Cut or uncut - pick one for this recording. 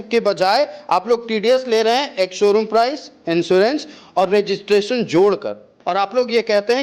cut